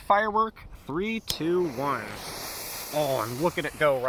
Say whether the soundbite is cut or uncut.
uncut